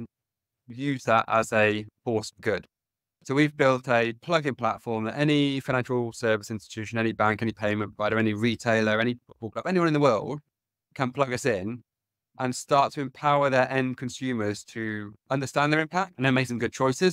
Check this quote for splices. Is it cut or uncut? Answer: cut